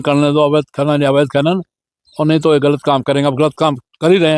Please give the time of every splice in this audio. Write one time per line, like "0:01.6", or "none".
none